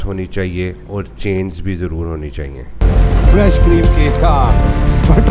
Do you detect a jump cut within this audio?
yes; 1 cut; at 2.8 s

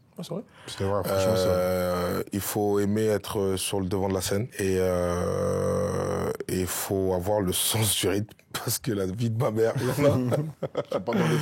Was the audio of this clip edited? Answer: no; 0 cuts

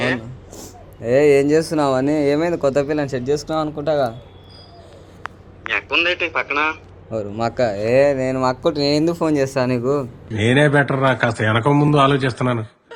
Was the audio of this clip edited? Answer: no; 0 cuts

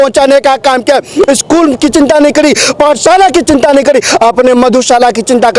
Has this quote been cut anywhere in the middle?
no; 0 cuts

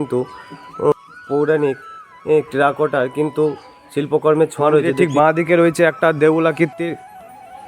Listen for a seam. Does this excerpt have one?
yes; 2 cuts; at 0.9 s, 4.9 s

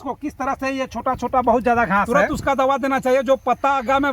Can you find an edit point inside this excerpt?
yes; 1 cut; at 2.1 s

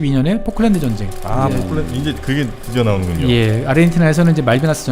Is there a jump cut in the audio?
no; 0 cuts

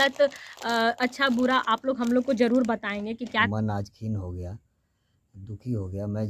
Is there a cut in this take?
yes; 1 cut; at 3.5 s

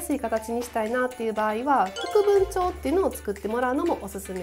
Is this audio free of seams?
yes; 0 cuts

